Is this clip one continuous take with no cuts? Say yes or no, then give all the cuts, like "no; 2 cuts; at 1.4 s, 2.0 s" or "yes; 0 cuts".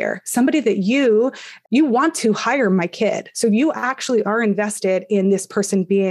no; 1 cut; at 1.5 s